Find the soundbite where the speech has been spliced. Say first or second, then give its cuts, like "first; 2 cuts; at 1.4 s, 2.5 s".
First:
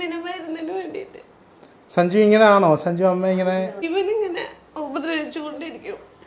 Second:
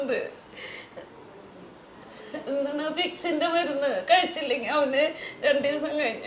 first; 1 cut; at 3.8 s